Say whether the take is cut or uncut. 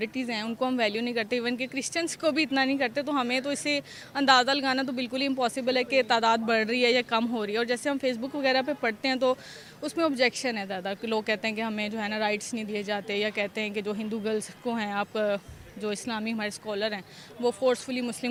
uncut